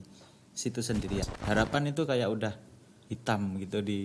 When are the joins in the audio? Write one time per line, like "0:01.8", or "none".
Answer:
0:01.3